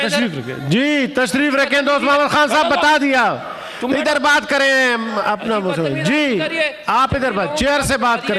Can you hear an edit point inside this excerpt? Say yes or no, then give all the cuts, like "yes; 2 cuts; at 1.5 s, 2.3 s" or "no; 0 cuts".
no; 0 cuts